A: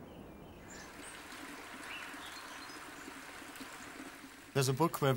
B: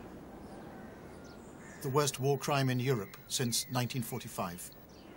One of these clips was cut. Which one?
B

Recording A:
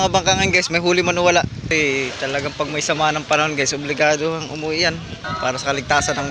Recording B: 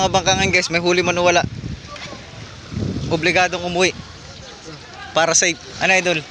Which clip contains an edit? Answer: A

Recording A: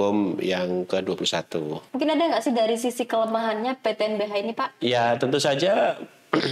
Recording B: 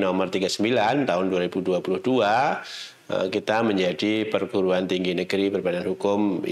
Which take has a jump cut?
A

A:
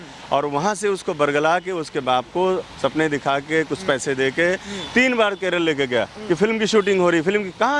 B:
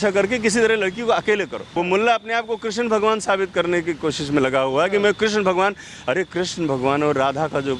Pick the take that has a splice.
B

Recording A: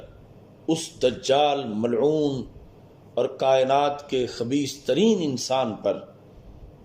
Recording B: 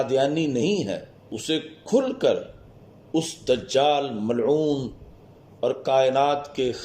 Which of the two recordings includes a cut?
B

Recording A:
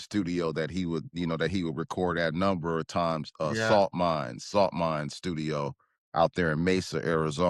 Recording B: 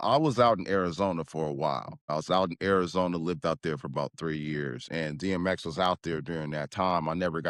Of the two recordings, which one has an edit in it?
B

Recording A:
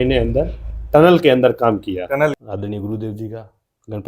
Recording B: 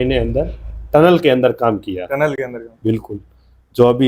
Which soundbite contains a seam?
A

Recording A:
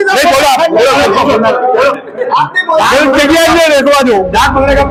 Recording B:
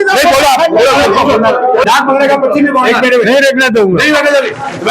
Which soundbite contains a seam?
B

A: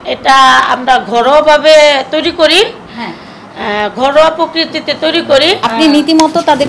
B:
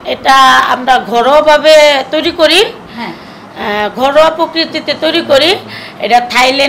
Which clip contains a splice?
A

